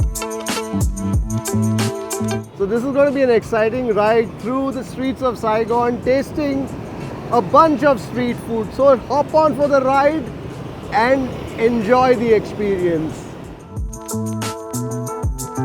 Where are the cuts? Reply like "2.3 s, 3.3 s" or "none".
2.4 s, 13.8 s